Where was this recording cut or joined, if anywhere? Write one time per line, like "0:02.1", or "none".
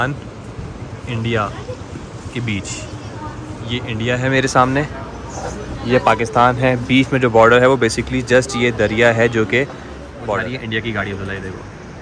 0:10.4